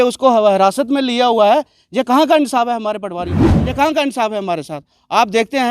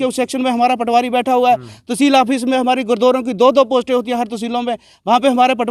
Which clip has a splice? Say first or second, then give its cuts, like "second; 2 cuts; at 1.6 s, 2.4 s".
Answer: first; 1 cut; at 3.5 s